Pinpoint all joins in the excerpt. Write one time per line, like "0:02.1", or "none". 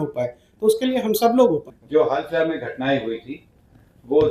0:01.7